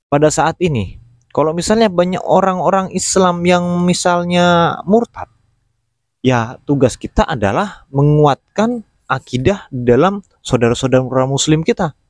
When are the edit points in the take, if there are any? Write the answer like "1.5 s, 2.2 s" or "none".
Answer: none